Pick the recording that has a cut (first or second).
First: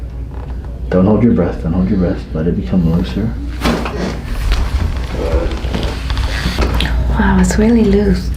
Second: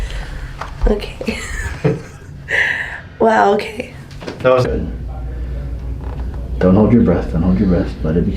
second